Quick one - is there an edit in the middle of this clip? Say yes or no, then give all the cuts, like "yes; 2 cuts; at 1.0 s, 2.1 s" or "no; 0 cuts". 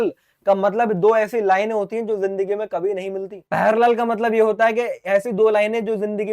yes; 1 cut; at 3.3 s